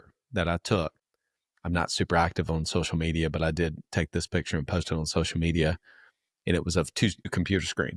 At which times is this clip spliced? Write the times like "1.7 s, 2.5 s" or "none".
none